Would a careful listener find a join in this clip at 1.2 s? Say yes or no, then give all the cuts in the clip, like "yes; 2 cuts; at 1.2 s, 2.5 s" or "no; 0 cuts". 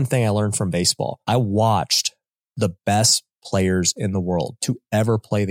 yes; 1 cut; at 1.2 s